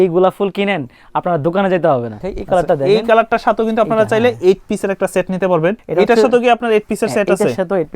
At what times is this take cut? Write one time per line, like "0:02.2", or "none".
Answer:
0:02.3
0:05.8